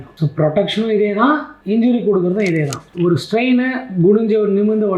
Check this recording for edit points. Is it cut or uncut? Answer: cut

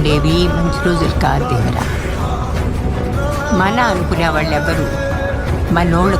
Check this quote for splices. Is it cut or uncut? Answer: cut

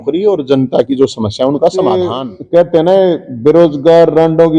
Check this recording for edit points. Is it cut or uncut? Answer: cut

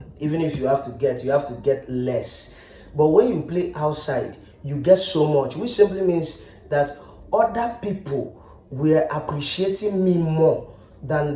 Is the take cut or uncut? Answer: uncut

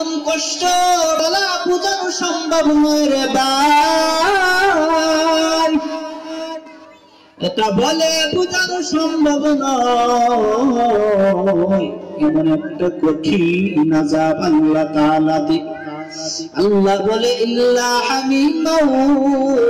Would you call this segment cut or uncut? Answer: cut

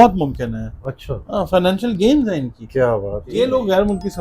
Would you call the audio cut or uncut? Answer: cut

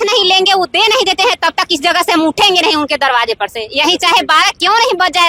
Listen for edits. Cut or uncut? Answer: uncut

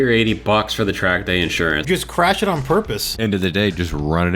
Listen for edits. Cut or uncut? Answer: cut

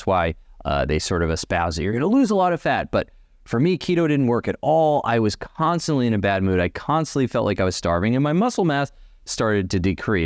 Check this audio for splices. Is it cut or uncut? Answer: uncut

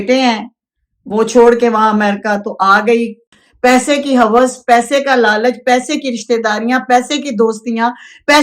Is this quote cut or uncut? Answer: cut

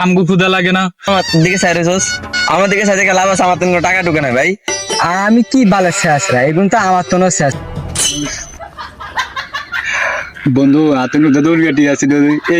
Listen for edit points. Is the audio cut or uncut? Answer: cut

